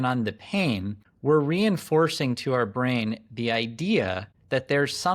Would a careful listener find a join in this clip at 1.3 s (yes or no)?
no